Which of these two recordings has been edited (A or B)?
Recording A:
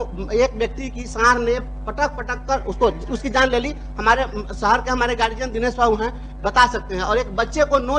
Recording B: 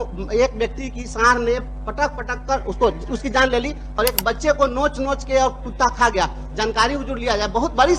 B